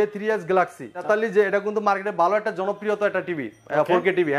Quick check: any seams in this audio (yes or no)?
yes